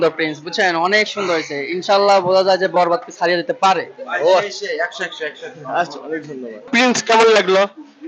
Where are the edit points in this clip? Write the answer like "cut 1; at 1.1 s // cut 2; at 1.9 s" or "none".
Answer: cut 1; at 6.7 s